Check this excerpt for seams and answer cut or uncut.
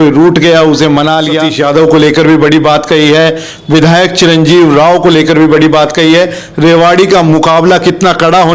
cut